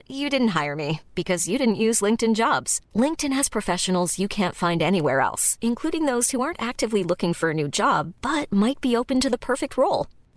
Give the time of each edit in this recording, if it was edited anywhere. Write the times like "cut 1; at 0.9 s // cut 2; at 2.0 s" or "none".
none